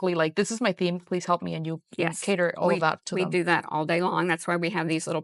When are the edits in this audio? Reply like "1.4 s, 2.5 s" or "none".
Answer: none